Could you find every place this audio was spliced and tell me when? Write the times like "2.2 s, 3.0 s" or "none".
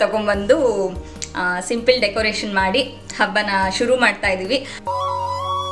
4.8 s